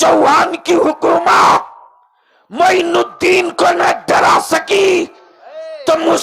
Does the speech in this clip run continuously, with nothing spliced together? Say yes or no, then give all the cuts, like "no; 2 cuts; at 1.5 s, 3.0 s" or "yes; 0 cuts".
yes; 0 cuts